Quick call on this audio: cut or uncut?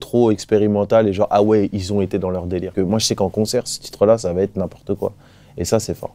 cut